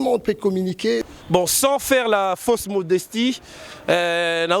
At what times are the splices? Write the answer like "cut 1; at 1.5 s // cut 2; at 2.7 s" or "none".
cut 1; at 1.0 s